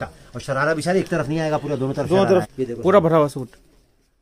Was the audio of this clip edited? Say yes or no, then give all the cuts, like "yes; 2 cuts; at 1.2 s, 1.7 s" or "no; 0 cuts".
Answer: yes; 1 cut; at 2.5 s